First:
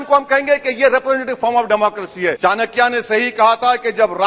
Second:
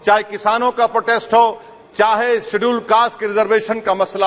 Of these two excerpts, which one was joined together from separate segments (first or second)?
first